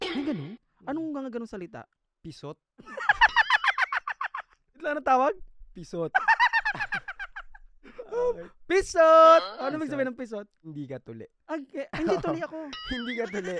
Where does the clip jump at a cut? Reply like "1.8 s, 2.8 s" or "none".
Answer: none